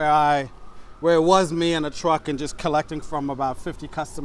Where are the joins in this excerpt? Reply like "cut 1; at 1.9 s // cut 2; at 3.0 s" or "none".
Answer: none